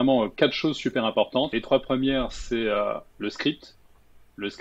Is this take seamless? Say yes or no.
no